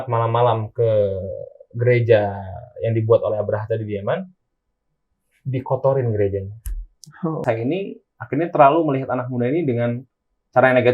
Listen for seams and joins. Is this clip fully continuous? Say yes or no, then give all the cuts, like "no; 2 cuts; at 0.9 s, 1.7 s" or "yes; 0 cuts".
no; 1 cut; at 7.4 s